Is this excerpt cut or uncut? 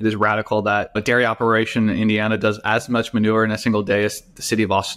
cut